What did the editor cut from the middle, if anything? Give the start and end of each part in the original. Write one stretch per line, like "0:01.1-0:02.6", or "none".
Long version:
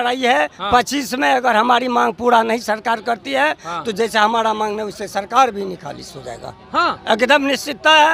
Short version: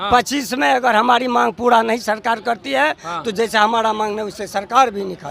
none